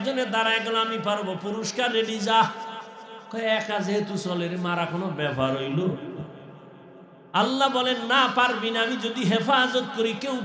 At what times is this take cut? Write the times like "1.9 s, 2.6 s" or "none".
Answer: none